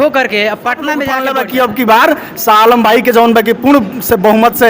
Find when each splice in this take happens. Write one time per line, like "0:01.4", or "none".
0:01.2